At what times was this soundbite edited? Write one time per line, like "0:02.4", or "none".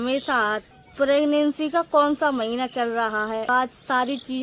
0:03.5